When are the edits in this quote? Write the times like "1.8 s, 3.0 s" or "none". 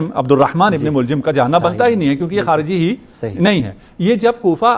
none